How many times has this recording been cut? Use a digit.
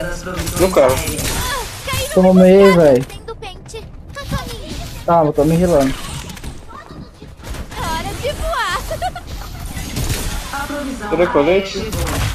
0